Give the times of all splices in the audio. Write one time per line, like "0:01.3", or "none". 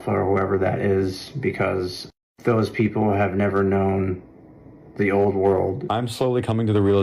0:05.8